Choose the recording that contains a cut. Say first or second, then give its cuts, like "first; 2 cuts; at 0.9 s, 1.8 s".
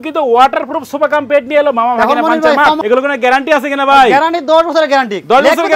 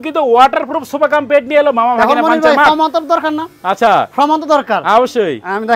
first; 1 cut; at 2.8 s